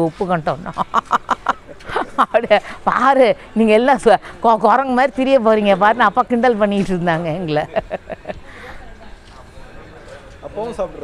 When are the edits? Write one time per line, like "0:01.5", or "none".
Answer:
none